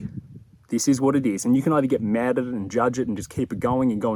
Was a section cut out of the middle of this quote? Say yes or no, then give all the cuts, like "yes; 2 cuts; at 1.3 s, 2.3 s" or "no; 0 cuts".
no; 0 cuts